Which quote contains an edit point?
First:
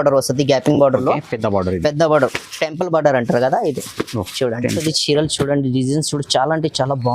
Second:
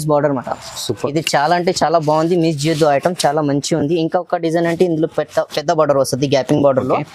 first; 1 cut; at 4.8 s

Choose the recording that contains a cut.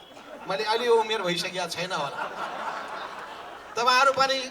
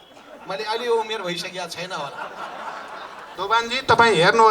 second; 1 cut; at 3.3 s

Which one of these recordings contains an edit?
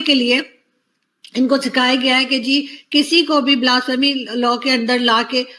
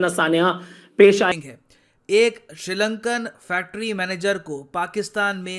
second; 1 cut; at 1.3 s

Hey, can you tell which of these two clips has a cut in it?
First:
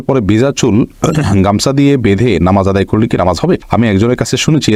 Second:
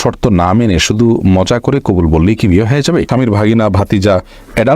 second; 1 cut; at 3.1 s

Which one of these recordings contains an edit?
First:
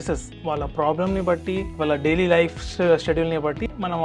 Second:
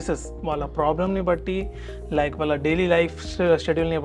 first; 1 cut; at 1.7 s

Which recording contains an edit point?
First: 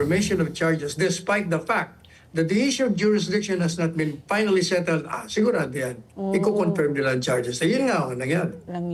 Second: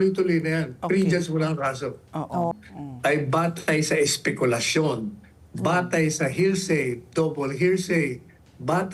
second; 1 cut; at 2.5 s

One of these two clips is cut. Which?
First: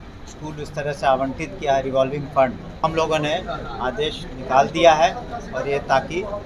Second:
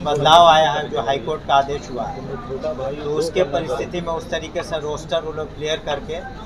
first; 1 cut; at 2.8 s

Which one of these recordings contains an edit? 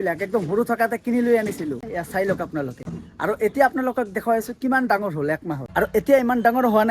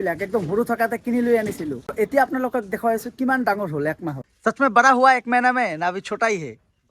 second; 2 cuts; at 1.9 s, 4.1 s

